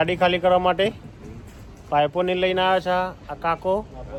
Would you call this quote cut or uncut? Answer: uncut